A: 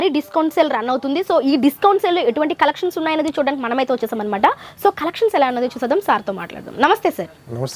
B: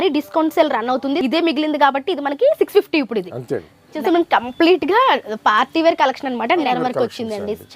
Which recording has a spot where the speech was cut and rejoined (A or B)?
B